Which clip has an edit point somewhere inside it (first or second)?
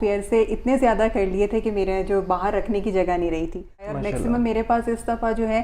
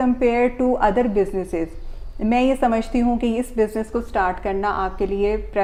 first